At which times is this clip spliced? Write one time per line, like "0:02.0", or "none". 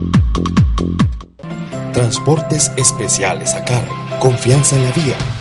0:01.1